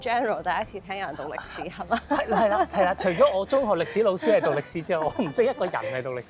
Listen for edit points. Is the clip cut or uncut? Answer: uncut